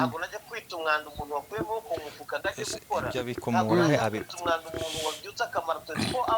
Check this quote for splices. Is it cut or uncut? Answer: uncut